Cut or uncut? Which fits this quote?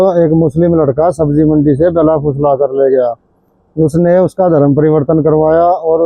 uncut